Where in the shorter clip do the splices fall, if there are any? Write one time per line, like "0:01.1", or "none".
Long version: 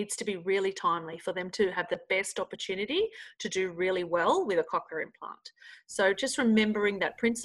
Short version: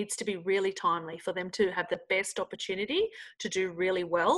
none

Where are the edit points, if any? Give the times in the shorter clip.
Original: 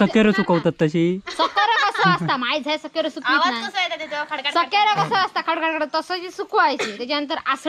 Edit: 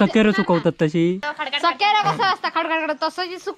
0:01.3

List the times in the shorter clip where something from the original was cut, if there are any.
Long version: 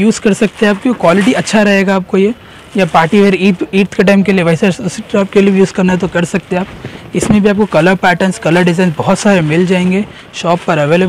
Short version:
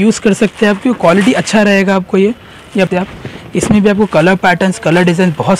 0:02.9

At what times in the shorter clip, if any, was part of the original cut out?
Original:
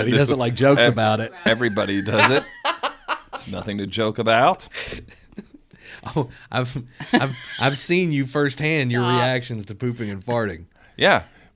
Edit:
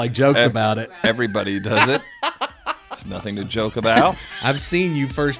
0:04.3

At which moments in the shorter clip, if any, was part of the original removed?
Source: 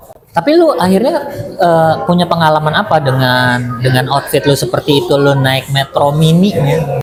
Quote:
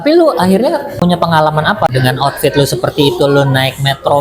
0:00.9
0:01.9

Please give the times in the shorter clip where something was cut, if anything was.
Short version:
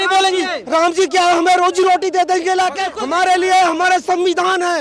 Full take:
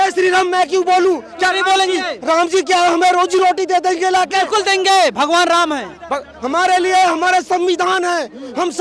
0:02.9

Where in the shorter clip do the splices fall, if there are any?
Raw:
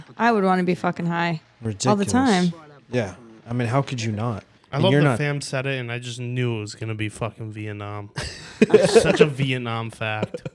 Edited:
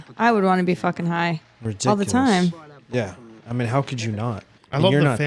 none

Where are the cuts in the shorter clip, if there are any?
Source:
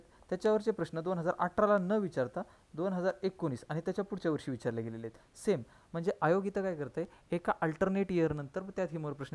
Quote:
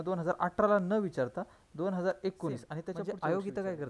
0:02.9

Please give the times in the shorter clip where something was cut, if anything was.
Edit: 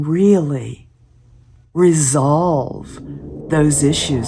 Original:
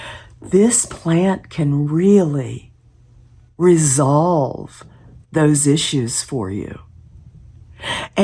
none

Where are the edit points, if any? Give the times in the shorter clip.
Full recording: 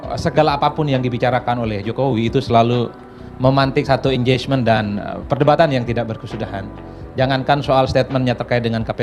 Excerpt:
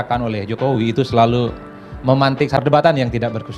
0:02.0

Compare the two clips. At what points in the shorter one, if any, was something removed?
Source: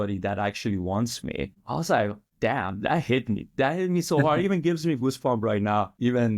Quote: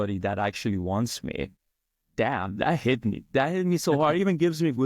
0:02.0

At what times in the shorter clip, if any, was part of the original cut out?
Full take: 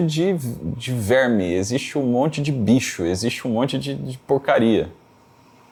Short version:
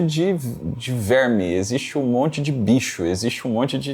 none

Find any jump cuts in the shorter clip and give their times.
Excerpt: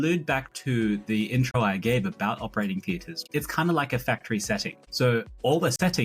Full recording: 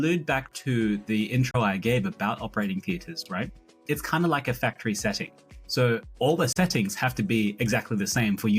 0:03.1
0:04.8

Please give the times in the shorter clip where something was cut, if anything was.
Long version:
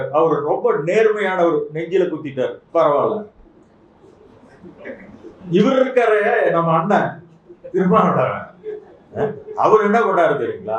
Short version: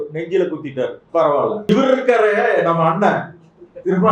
0:01.7

